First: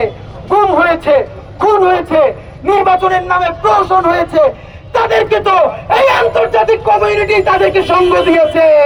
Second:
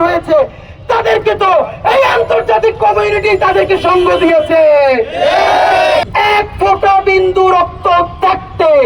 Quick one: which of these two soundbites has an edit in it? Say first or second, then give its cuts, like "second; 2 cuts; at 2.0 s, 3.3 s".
second; 1 cut; at 6.1 s